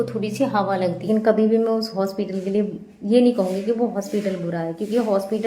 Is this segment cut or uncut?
cut